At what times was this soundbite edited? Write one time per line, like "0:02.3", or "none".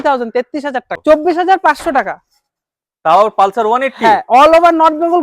0:00.9

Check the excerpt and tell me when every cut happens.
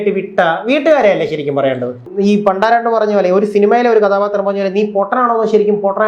0:02.0

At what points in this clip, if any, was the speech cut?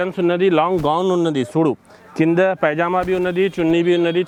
none

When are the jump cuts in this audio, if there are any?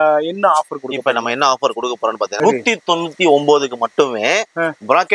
0:02.3

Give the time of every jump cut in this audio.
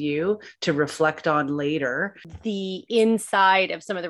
0:02.2

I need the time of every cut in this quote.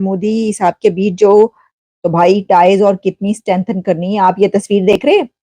0:01.6

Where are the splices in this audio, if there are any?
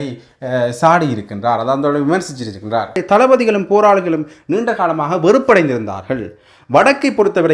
0:03.0

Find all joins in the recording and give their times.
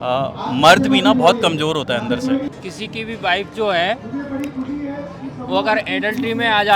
0:02.4

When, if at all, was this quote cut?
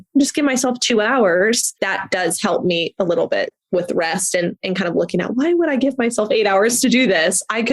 0:01.7

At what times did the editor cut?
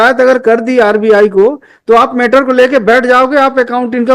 none

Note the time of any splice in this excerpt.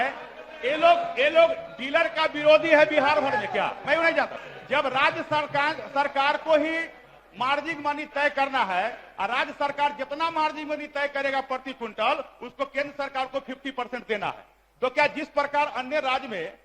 0:04.3

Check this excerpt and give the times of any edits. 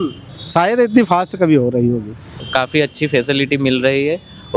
0:02.4

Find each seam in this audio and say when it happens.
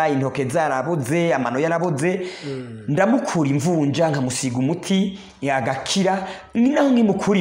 none

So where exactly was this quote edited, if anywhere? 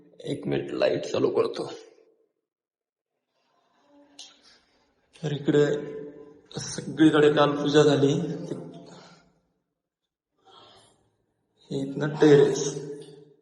none

